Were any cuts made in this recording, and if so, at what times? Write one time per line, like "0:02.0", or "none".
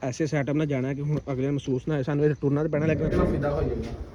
0:03.1

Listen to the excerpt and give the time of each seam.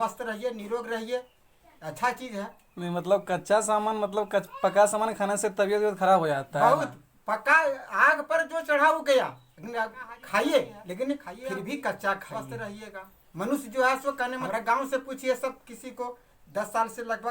0:14.4

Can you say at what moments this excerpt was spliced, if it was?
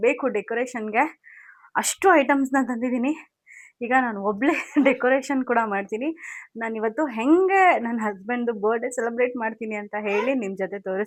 none

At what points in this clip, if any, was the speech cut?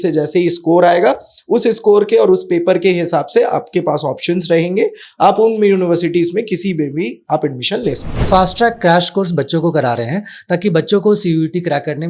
0:08.1

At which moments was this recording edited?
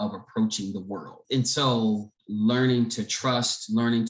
0:01.2
0:02.2

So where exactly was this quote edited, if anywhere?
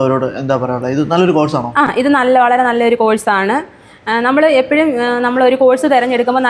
none

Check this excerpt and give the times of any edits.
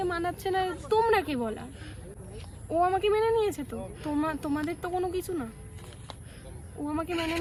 none

